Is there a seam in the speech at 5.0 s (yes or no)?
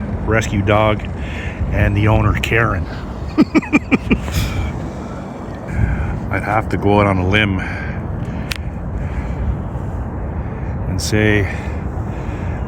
no